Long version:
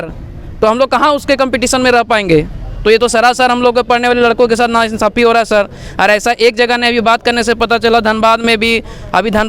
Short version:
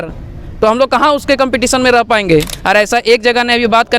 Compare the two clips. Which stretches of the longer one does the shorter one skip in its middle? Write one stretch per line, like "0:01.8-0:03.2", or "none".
0:02.5-0:05.9